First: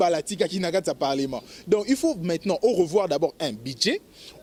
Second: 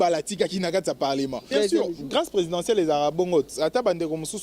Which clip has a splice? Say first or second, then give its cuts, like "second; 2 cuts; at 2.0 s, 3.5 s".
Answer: second; 1 cut; at 1.4 s